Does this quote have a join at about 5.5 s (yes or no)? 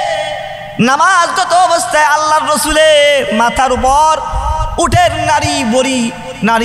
no